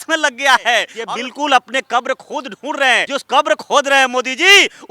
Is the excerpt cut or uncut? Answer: cut